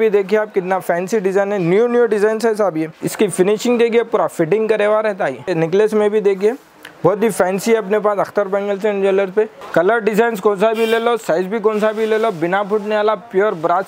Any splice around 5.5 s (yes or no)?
yes